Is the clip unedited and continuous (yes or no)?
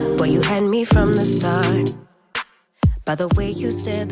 no